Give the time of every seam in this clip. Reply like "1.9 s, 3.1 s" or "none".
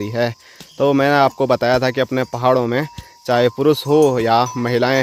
none